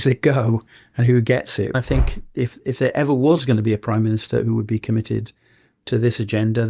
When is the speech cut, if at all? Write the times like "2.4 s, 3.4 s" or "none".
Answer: 1.8 s